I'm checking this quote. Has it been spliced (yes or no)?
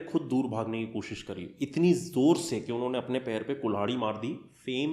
no